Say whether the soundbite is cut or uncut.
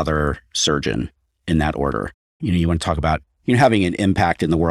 cut